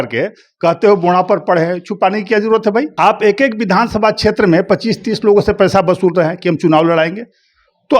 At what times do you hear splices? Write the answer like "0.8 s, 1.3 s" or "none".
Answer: 2.9 s